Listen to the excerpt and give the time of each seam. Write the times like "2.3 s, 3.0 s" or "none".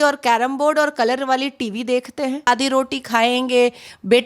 2.5 s

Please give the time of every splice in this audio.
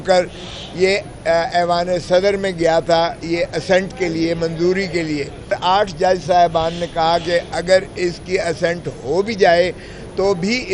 5.5 s

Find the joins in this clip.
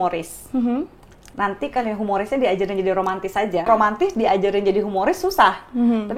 3.7 s

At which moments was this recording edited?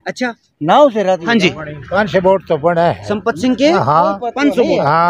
1.3 s

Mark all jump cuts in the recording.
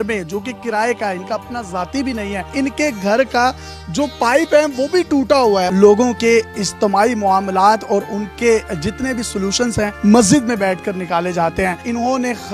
2.5 s, 5.7 s

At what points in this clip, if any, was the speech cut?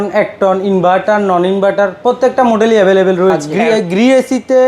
3.5 s

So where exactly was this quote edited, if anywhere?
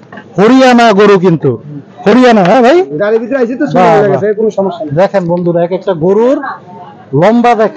none

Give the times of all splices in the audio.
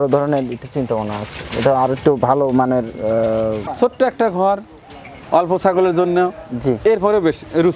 3.7 s

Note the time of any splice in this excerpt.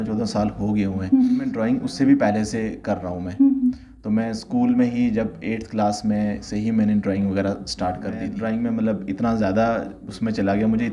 1.6 s, 8.3 s

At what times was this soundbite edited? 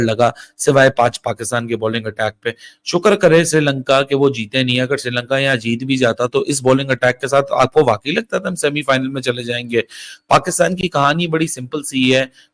none

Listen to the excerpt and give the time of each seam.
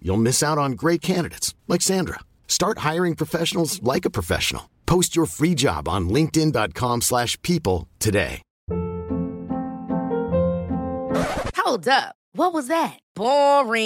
8.5 s

